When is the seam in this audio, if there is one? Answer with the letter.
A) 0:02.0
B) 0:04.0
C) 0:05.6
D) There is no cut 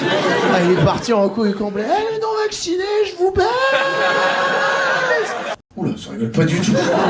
C